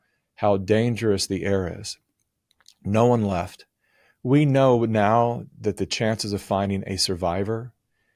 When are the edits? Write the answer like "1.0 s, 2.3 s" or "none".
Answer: none